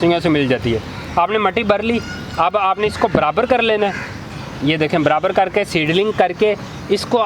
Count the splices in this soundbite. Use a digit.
0